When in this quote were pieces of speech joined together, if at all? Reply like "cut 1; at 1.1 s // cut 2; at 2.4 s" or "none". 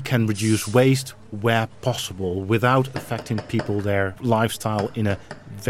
cut 1; at 4.2 s